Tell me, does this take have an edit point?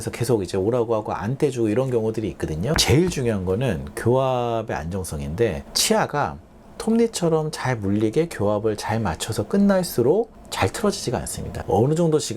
yes; 2 cuts; at 2.8 s, 11.5 s

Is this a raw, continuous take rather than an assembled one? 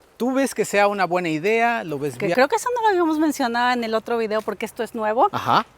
no; 1 cut; at 2.2 s

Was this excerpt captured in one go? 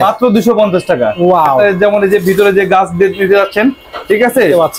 no; 1 cut; at 1.6 s

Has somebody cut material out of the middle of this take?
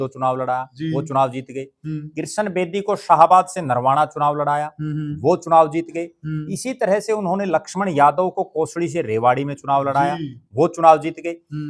no; 0 cuts

